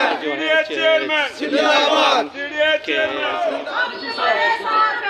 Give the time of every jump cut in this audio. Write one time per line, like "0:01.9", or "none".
0:03.4